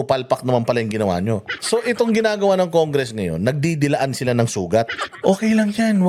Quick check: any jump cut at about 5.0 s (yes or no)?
yes